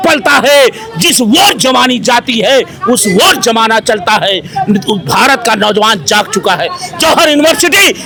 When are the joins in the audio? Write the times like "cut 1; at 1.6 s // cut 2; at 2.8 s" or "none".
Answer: none